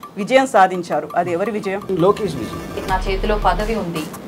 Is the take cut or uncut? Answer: cut